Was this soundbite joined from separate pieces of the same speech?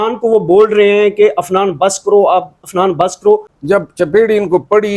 yes; 1 cut; at 3.5 s

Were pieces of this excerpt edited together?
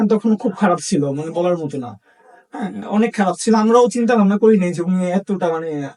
no; 0 cuts

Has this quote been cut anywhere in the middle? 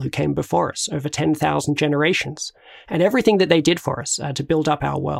no; 0 cuts

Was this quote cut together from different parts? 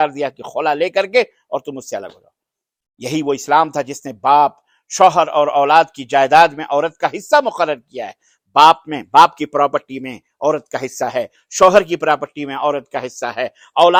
no; 0 cuts

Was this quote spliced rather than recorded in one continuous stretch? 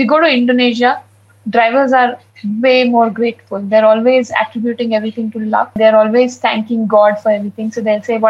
yes; 1 cut; at 5.8 s

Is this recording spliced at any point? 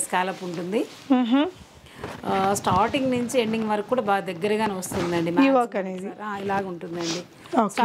no; 0 cuts

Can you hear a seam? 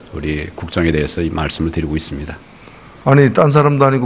yes; 1 cut; at 2.4 s

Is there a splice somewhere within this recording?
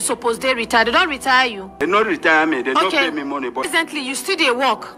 yes; 2 cuts; at 1.8 s, 3.7 s

